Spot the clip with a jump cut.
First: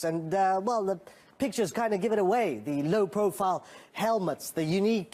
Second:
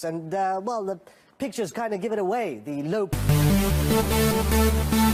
first; 1 cut; at 3.1 s

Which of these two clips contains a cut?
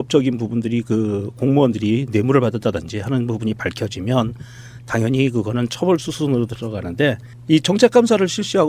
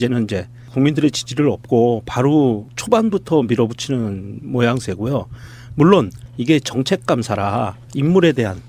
first; 1 cut; at 1.4 s

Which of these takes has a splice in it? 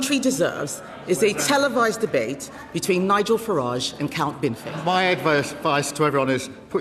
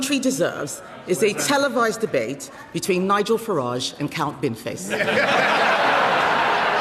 first; 1 cut; at 4.7 s

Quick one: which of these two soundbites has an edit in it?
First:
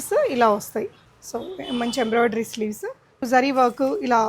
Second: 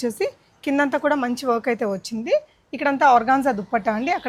first; 1 cut; at 3.2 s

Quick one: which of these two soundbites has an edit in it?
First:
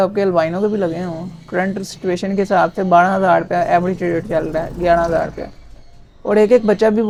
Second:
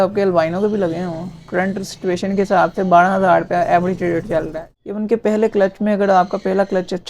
second; 1 cut; at 4.6 s

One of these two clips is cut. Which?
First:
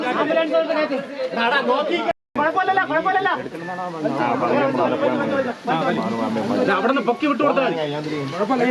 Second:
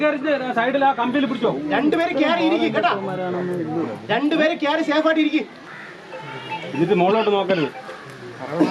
first; 1 cut; at 2.1 s

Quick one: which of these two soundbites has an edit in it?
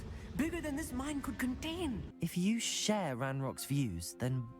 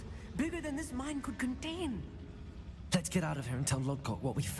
first; 1 cut; at 2.1 s

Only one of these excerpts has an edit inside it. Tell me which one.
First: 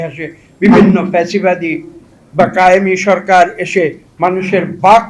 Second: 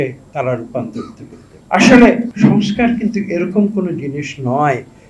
second; 2 cuts; at 1.6 s, 2.3 s

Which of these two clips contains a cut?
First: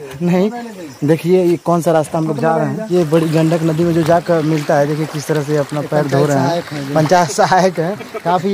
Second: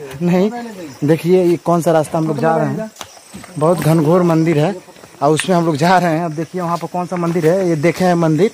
first; 1 cut; at 2.9 s

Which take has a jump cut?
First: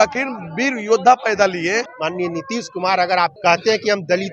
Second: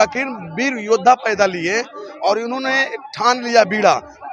first; 2 cuts; at 1.9 s, 3.4 s

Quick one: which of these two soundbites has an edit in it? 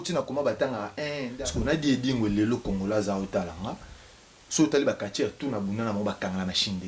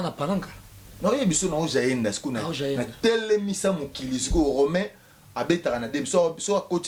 first; 1 cut; at 1.2 s

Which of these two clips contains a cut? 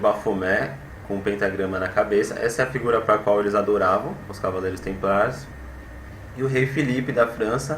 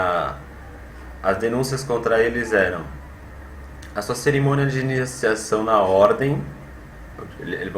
first; 1 cut; at 4.0 s

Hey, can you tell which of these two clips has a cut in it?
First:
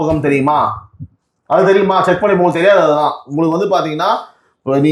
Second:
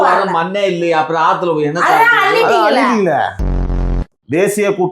second; 1 cut; at 3.9 s

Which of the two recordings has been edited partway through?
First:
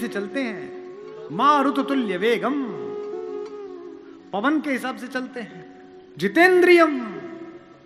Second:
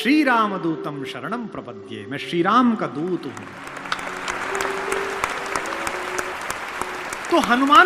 second; 1 cut; at 6.7 s

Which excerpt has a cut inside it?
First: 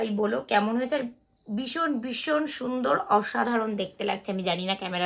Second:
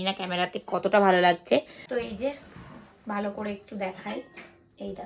second; 1 cut; at 1.8 s

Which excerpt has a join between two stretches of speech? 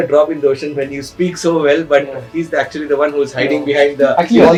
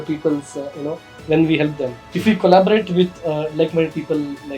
second; 1 cut; at 2.0 s

